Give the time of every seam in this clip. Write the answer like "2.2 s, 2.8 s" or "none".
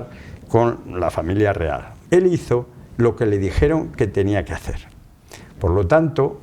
1.9 s